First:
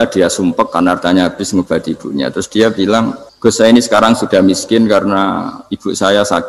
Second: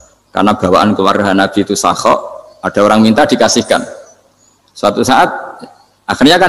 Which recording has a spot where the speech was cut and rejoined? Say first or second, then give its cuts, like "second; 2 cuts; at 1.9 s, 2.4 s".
first; 1 cut; at 3.2 s